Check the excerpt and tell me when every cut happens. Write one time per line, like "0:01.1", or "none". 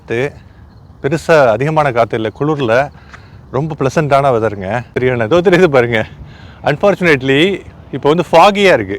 0:04.9